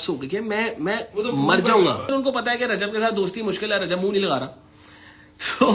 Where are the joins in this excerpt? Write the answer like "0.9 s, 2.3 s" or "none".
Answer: 2.1 s